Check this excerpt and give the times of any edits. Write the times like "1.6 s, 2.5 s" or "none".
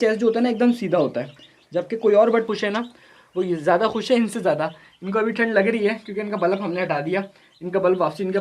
2.5 s